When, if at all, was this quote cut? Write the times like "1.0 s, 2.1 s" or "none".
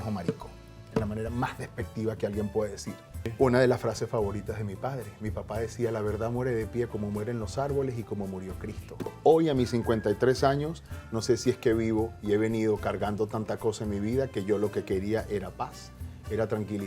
3.3 s, 9.1 s